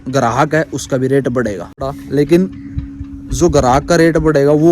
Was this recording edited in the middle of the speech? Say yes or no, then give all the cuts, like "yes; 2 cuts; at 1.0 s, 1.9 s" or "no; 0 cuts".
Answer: yes; 1 cut; at 1.8 s